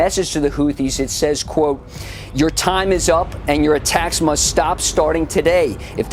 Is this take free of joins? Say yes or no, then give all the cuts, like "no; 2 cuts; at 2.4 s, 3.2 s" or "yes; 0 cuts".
yes; 0 cuts